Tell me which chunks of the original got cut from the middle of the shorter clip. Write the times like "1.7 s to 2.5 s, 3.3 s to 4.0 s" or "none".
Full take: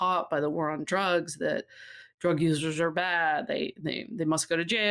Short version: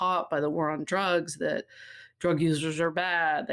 none